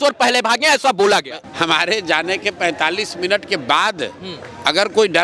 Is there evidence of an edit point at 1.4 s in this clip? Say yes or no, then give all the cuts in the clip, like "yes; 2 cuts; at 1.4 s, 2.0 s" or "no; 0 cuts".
yes; 1 cut; at 1.4 s